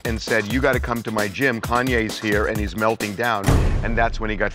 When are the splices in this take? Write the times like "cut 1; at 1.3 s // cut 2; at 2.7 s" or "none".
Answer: none